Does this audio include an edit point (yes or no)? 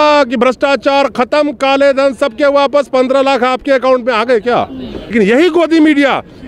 yes